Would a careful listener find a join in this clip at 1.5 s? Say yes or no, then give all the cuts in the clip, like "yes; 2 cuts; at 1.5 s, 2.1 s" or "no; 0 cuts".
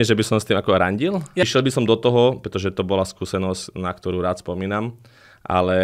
yes; 1 cut; at 1.5 s